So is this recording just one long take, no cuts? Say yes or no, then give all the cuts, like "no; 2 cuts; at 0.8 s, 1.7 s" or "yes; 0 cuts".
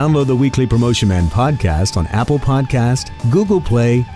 no; 1 cut; at 3.2 s